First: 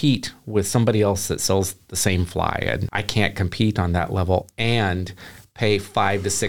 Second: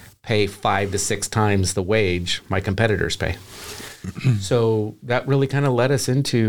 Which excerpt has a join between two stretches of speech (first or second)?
first